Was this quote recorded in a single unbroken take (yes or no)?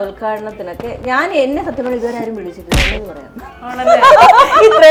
yes